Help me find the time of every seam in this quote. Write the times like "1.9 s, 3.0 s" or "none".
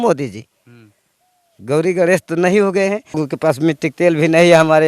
3.2 s

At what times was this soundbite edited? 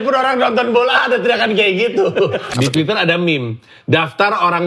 2.5 s

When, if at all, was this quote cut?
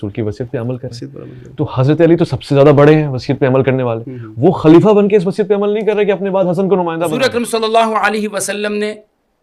7.1 s

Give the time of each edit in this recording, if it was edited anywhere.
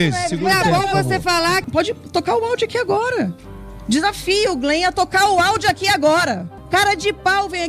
1.7 s, 6.5 s

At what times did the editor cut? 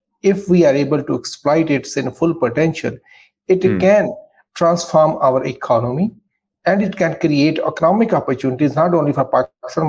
none

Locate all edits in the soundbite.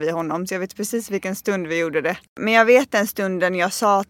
2.4 s

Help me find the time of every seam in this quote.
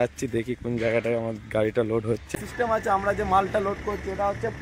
2.2 s

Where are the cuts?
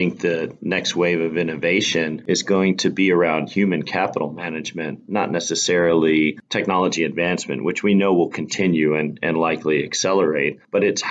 2.2 s

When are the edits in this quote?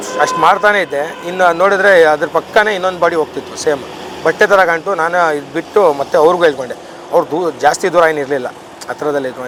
none

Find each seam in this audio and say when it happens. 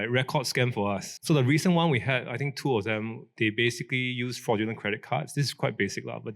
1.1 s

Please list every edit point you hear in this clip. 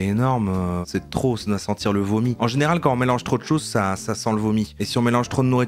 0.8 s, 2.4 s

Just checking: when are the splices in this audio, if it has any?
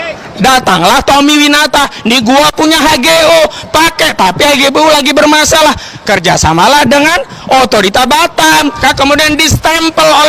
8.8 s

